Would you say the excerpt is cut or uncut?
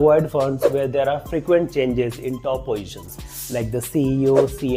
uncut